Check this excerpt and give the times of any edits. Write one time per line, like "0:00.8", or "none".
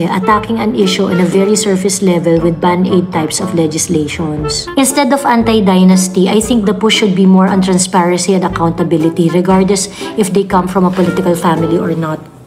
0:04.6